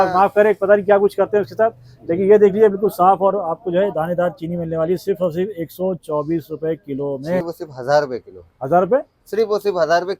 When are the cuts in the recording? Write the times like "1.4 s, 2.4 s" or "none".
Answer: 7.4 s